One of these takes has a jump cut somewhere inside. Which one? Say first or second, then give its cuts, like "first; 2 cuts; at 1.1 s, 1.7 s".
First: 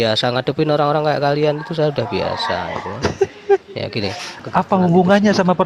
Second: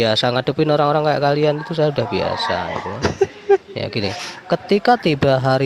first; 1 cut; at 4.4 s